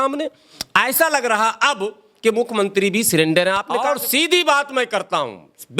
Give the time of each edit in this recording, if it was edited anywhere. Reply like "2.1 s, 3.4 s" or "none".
3.7 s